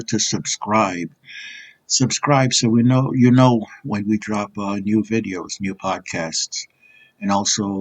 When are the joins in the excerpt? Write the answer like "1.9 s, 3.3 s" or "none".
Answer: none